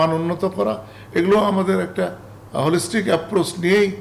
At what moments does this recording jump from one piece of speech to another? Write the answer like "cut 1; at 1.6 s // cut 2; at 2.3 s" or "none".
none